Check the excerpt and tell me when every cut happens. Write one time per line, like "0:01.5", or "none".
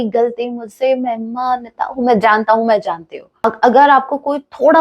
0:03.4